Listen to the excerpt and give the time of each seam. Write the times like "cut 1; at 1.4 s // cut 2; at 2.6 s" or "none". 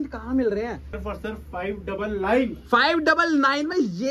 cut 1; at 0.9 s